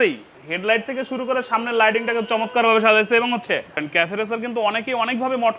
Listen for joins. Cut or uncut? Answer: cut